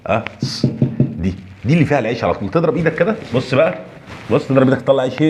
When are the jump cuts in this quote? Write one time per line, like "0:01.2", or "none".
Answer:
none